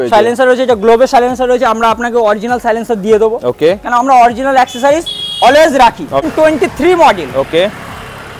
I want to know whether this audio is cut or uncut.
cut